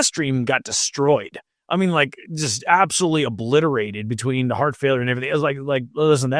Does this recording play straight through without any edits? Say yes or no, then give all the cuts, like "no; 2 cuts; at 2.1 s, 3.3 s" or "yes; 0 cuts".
yes; 0 cuts